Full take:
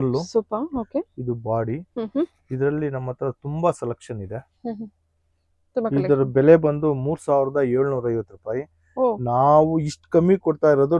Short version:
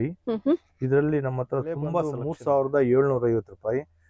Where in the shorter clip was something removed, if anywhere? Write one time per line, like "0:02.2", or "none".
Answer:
0:02.2